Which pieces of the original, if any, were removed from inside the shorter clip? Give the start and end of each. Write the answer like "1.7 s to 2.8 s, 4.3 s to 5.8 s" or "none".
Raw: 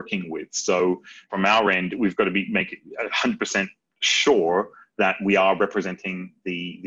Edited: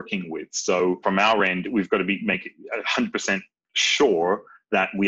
1.0 s to 1.3 s